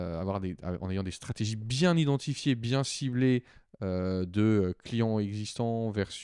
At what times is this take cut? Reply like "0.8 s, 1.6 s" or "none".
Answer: none